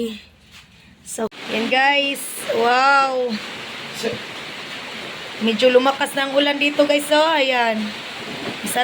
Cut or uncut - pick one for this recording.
cut